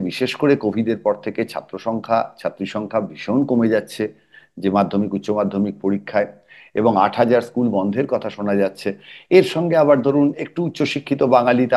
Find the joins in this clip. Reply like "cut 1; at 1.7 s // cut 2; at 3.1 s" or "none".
none